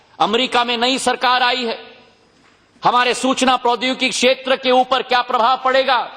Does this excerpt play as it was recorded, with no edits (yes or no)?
yes